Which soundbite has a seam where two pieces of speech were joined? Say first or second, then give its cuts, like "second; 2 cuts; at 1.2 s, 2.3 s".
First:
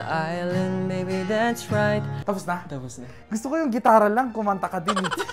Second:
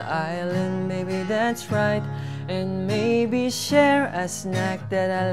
first; 1 cut; at 2.1 s